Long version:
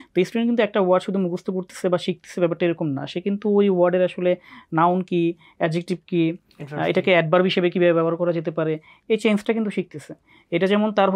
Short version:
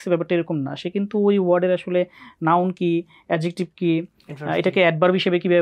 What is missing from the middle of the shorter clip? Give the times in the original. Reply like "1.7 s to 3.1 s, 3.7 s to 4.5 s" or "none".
none